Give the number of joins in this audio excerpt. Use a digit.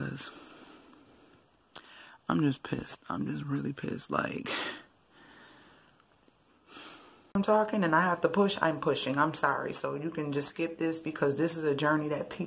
1